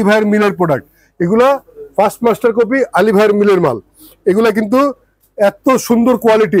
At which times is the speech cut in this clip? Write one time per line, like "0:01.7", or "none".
none